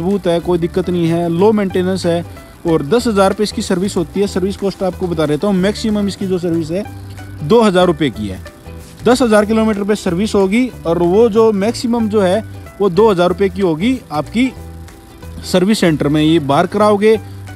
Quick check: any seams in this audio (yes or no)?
no